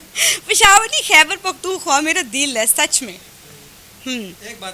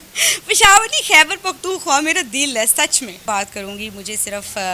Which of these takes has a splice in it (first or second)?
second